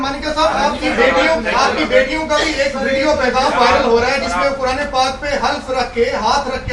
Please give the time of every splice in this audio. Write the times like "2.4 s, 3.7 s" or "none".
none

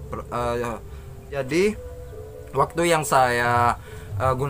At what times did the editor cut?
1.3 s

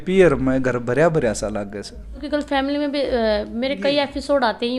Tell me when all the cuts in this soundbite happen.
2.2 s

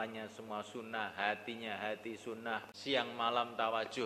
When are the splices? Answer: 2.7 s

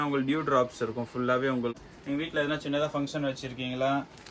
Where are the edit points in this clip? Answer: 1.8 s

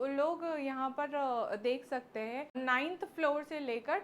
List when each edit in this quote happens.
2.5 s

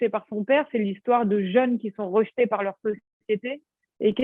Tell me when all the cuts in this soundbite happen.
none

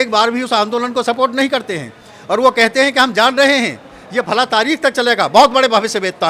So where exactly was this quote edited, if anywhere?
none

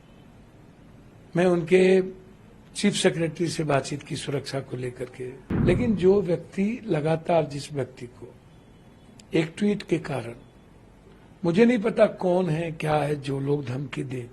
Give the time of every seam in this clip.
5.5 s

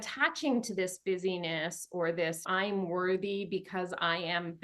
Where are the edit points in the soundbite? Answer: 2.4 s

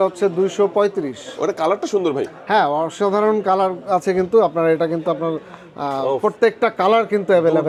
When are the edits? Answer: none

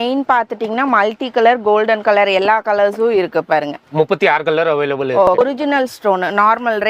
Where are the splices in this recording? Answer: 5.4 s

